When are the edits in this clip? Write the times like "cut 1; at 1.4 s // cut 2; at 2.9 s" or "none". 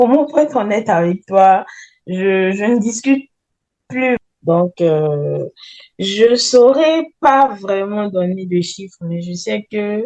cut 1; at 4.2 s